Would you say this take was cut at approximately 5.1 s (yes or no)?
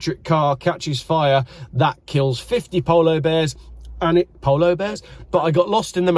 yes